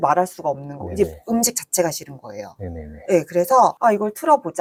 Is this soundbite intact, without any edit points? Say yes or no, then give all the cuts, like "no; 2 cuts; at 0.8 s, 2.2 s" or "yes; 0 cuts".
yes; 0 cuts